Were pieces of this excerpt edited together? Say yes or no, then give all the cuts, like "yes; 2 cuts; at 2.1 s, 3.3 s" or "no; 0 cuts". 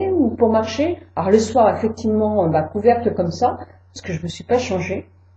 yes; 1 cut; at 1.8 s